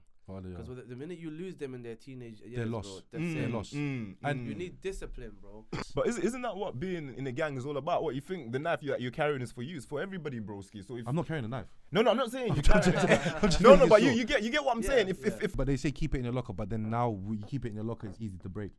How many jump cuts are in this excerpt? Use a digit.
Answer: 2